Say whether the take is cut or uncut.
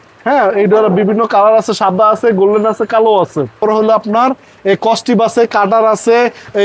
cut